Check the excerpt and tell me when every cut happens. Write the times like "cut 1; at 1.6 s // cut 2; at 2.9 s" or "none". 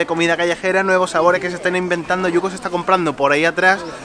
none